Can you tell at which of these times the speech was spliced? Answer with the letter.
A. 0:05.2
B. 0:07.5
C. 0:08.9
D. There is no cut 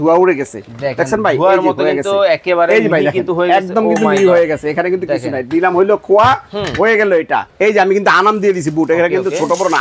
B